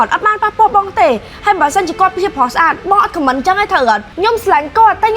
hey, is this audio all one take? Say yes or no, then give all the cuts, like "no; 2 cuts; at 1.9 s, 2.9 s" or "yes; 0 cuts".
no; 1 cut; at 4.1 s